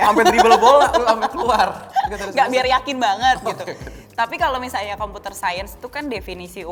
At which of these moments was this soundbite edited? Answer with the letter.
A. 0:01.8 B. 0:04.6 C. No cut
C